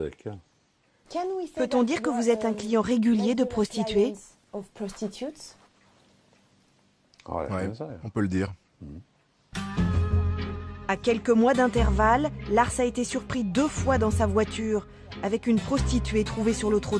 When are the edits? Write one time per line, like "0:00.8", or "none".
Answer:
0:09.0